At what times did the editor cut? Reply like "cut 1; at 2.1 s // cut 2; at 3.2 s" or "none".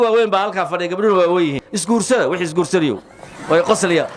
cut 1; at 1.7 s